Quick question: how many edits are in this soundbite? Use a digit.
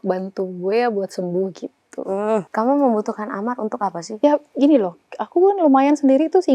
1